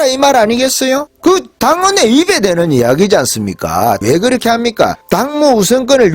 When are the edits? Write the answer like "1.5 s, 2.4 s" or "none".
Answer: 1.1 s, 4.0 s, 5.0 s